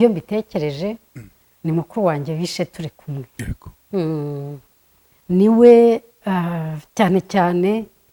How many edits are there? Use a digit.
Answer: 0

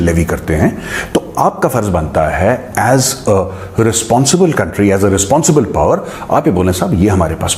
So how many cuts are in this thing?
0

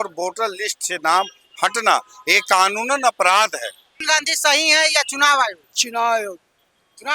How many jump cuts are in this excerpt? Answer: 1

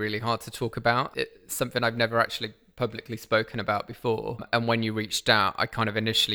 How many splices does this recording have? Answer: 2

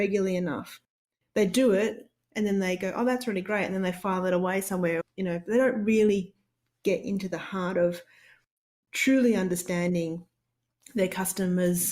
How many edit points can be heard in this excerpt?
1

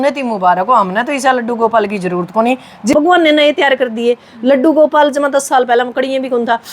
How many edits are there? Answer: 1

